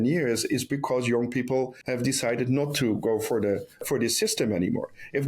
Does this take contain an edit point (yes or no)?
yes